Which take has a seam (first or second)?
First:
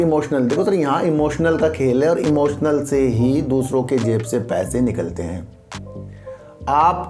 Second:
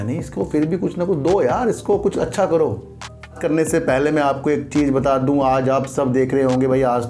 second